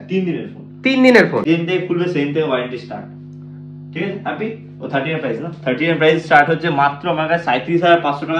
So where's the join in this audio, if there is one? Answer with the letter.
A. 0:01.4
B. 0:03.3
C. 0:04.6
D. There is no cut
A